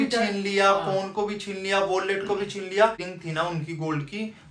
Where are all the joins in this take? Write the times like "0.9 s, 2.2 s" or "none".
3.1 s